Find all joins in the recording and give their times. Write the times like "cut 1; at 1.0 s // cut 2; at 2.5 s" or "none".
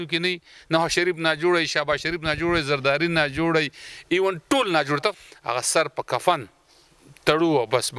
cut 1; at 5.2 s

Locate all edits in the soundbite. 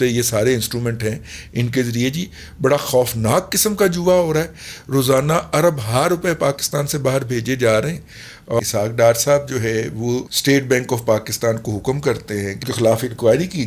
cut 1; at 8.6 s // cut 2; at 10.3 s // cut 3; at 12.6 s

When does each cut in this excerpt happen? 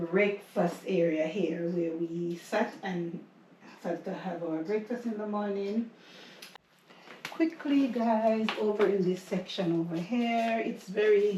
cut 1; at 6.5 s

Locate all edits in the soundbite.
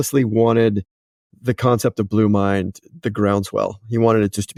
none

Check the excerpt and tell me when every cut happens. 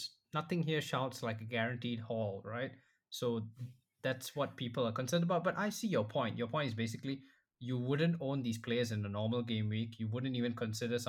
none

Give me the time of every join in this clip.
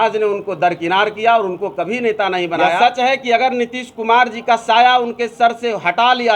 cut 1; at 2.8 s

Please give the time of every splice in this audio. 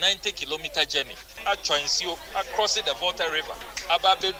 none

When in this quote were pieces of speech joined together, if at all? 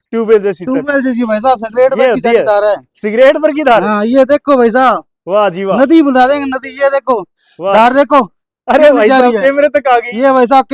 none

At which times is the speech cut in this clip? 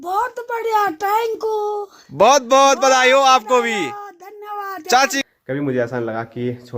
cut 1; at 5.2 s

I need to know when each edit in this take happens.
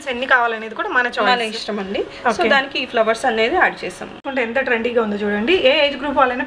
cut 1; at 4.3 s

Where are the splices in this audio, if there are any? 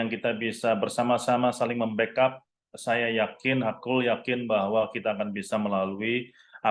none

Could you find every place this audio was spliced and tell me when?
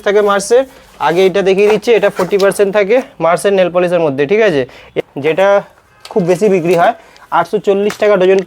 cut 1; at 5.0 s

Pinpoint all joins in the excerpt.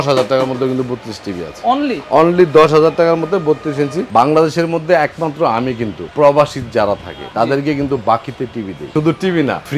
cut 1; at 4.0 s // cut 2; at 6.0 s // cut 3; at 7.2 s // cut 4; at 8.8 s

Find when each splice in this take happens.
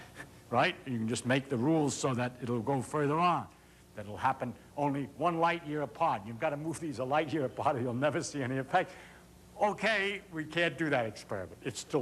cut 1; at 2.6 s

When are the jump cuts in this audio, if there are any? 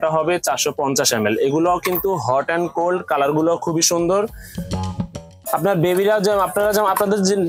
none

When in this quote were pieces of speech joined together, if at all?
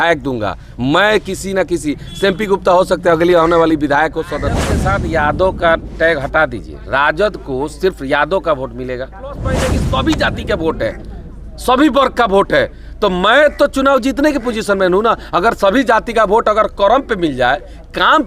cut 1; at 4.7 s // cut 2; at 9.7 s

